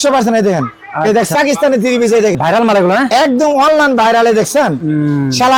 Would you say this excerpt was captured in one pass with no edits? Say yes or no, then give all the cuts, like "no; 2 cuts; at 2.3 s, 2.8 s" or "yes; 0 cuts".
no; 2 cuts; at 1.3 s, 2.4 s